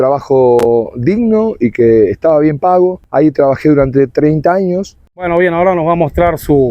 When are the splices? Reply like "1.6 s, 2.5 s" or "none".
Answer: 3.0 s, 5.3 s